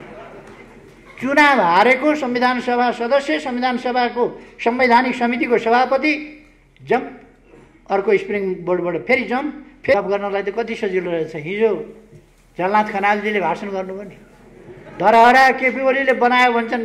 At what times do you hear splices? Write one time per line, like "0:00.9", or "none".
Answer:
0:09.9